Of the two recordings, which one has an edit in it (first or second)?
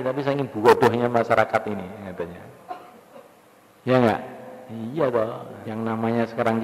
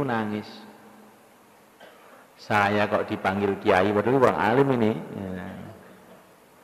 first